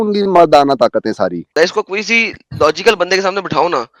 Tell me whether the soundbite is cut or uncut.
cut